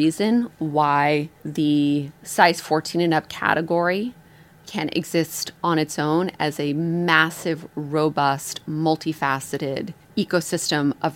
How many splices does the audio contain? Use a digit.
4